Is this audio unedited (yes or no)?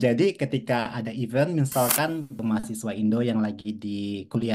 no